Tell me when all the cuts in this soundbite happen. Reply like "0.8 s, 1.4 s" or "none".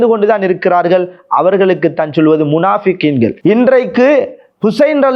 3.4 s